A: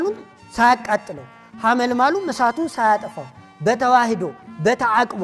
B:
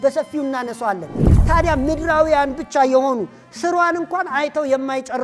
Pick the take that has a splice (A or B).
B